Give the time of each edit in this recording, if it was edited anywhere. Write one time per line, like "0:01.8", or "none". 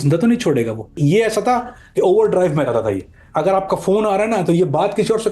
0:00.9